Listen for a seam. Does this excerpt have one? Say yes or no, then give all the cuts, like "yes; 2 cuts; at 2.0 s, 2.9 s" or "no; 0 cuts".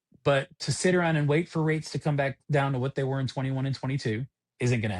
yes; 1 cut; at 2.4 s